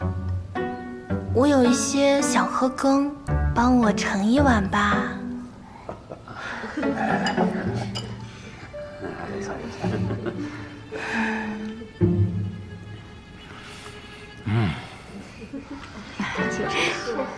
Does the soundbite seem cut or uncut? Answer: uncut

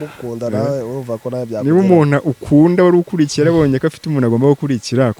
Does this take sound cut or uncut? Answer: uncut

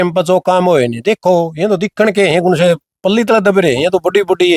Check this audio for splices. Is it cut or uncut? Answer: uncut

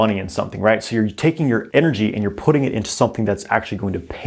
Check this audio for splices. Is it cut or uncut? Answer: cut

